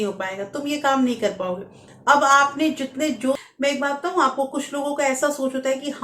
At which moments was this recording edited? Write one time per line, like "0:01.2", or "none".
0:03.4